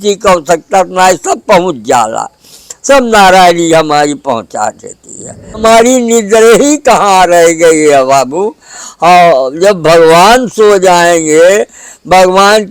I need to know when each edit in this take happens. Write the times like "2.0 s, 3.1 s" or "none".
5.6 s